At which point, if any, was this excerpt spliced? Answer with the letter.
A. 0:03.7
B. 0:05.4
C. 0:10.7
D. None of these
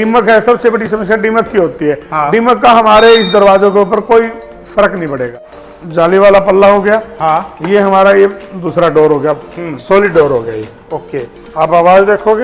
B